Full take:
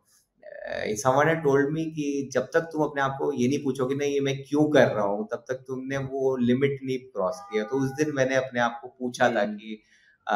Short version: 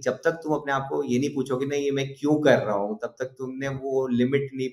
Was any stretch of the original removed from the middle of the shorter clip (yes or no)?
no